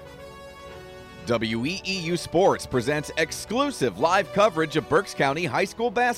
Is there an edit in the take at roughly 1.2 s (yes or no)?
yes